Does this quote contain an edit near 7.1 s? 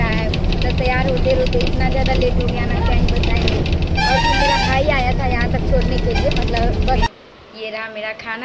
yes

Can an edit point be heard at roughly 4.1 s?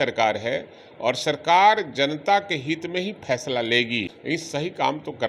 yes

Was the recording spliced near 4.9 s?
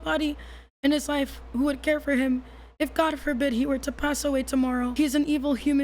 yes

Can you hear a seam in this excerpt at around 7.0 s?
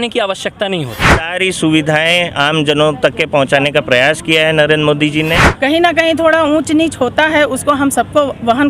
no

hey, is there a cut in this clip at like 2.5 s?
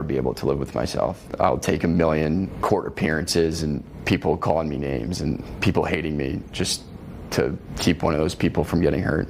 yes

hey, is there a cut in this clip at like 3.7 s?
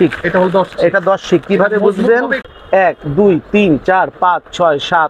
no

